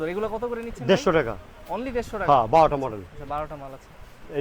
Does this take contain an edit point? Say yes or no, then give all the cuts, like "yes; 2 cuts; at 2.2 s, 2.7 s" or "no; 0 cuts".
no; 0 cuts